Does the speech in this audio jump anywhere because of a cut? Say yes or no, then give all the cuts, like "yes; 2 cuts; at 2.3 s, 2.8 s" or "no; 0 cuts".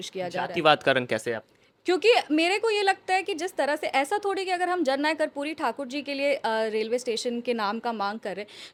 no; 0 cuts